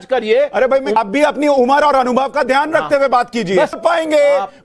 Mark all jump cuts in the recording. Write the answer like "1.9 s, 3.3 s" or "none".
1.0 s, 3.7 s